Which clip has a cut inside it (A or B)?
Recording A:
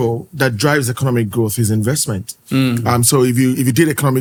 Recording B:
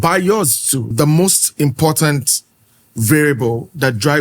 B